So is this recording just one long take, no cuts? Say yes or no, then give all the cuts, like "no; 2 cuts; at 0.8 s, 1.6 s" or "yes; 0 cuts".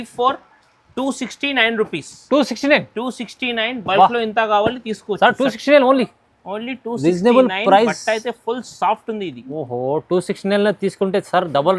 yes; 0 cuts